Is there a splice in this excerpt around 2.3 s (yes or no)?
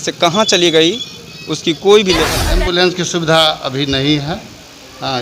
yes